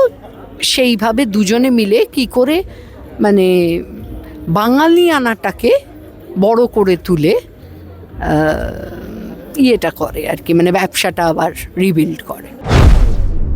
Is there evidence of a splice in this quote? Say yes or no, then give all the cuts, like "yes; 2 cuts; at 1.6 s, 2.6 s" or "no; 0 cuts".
yes; 1 cut; at 12.5 s